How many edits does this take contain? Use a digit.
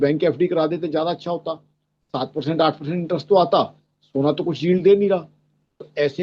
0